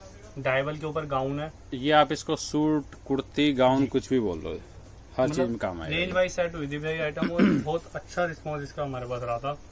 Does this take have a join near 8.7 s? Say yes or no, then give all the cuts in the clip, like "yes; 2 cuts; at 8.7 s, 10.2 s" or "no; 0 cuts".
no; 0 cuts